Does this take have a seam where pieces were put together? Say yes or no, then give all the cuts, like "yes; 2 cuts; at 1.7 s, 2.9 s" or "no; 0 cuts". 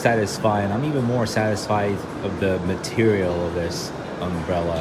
no; 0 cuts